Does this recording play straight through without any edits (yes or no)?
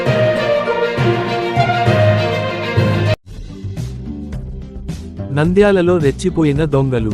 yes